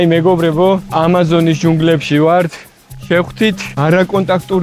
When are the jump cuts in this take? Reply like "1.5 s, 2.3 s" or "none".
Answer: none